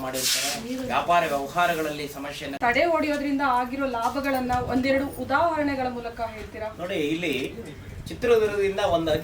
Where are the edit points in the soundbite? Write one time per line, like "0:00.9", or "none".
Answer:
0:02.6